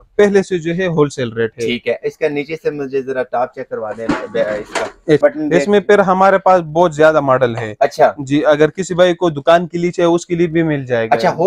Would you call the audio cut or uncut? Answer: cut